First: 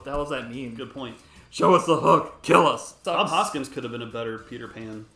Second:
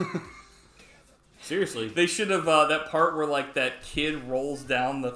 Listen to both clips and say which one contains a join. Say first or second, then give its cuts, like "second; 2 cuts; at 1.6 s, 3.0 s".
first; 1 cut; at 2.9 s